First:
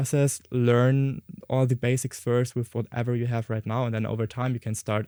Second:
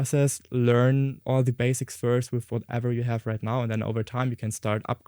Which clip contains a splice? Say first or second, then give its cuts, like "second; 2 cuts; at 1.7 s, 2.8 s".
second; 1 cut; at 1.2 s